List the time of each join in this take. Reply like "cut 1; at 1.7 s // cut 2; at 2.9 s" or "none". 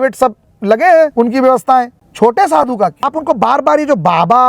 cut 1; at 1.1 s // cut 2; at 2.0 s // cut 3; at 3.1 s